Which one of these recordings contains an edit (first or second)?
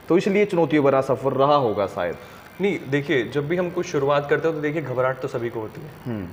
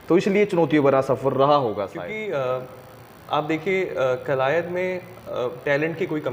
second